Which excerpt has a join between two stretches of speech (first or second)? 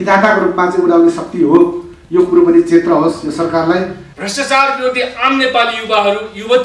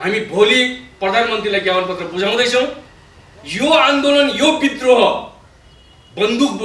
first